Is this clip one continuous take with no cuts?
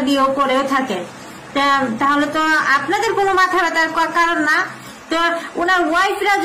yes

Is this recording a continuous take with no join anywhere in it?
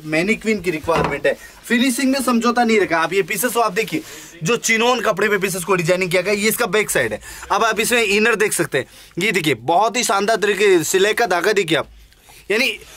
no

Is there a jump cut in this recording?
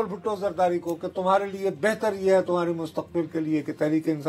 no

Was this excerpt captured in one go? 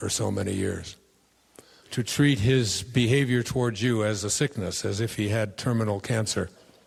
yes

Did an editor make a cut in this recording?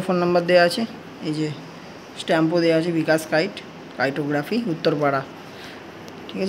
no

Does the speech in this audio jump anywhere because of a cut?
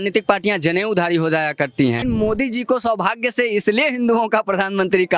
yes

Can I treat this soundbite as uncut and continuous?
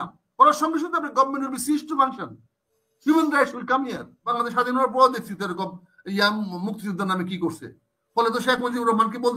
no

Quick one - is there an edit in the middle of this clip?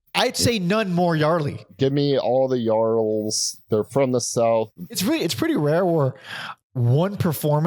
yes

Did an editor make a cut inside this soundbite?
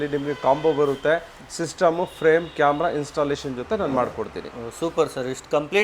no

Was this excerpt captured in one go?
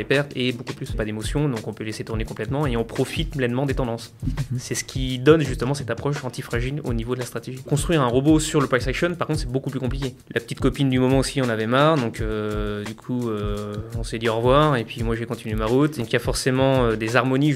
no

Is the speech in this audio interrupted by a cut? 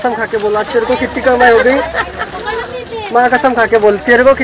no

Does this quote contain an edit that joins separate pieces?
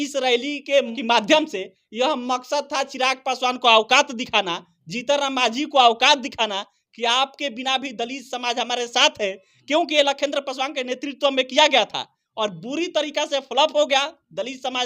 yes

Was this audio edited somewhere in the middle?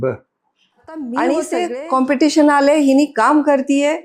yes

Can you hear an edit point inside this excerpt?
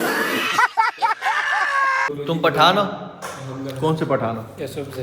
yes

